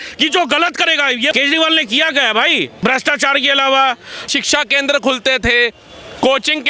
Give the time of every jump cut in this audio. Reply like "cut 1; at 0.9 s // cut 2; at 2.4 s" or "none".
cut 1; at 1.3 s // cut 2; at 2.7 s // cut 3; at 4.2 s